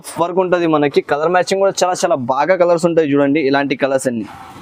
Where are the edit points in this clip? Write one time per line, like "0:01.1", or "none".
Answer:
none